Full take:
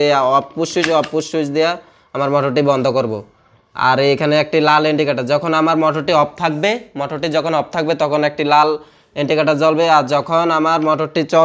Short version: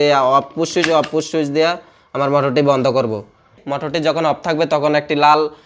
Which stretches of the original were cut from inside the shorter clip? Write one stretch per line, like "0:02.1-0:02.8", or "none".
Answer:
0:03.6-0:06.9

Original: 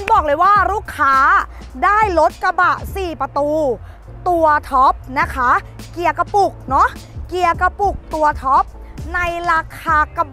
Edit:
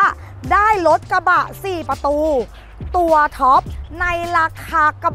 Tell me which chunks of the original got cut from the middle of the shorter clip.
0:05.1-0:08.9

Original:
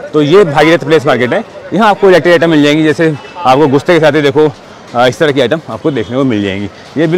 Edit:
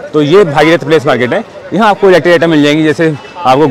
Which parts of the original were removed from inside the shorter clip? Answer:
none

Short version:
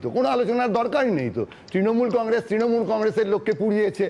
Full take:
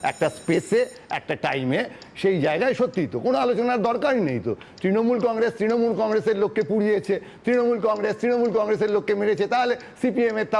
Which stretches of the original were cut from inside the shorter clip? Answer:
none

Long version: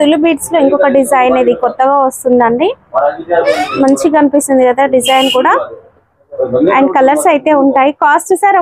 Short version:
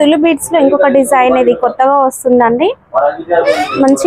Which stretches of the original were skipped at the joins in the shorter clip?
none

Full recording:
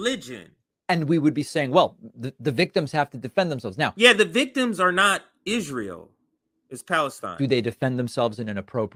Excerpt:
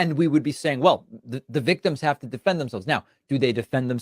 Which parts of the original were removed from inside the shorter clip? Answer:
0:03.9-0:07.1

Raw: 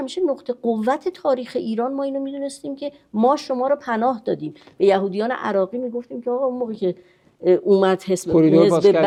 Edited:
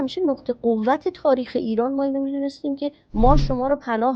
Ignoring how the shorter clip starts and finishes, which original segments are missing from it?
none

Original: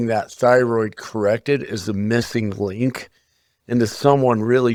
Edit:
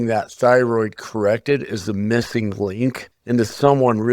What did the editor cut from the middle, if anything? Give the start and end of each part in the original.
0:03.1-0:03.5

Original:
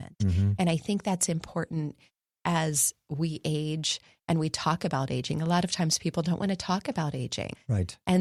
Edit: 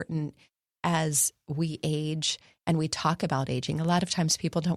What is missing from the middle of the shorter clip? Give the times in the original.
none

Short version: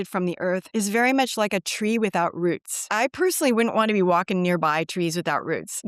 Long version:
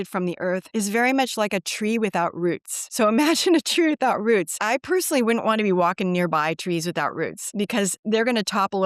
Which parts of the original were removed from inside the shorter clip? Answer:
0:02.8-0:04.5

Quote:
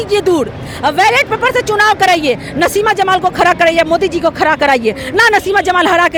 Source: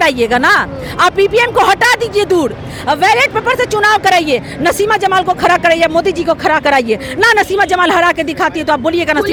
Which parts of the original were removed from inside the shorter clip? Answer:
none

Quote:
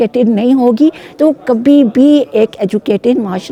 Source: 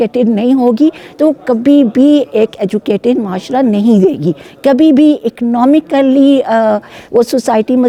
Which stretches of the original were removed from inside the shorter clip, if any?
none

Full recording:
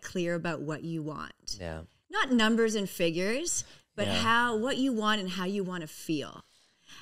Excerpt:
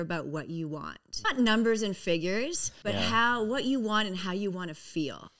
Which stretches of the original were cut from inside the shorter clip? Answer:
0:01.4-0:02.0
0:03.6-0:03.8

